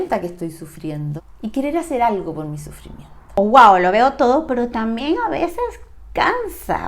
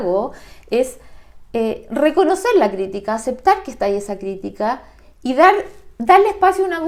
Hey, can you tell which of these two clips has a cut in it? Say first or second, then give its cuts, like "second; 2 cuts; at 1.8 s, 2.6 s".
first; 2 cuts; at 1.1 s, 3.4 s